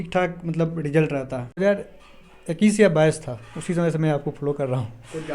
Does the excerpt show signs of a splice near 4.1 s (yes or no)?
no